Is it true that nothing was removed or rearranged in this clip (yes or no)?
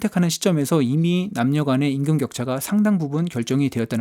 yes